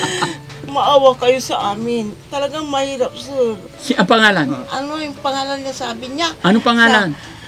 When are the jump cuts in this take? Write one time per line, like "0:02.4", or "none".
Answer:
0:03.7